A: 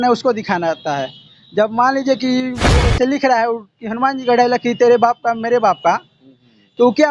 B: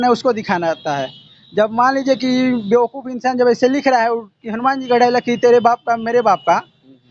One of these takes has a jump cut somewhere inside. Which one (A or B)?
A